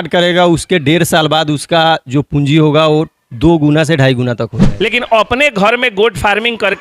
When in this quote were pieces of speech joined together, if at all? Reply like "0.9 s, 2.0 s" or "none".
4.6 s